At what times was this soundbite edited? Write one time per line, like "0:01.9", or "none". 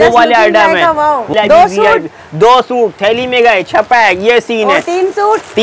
0:01.3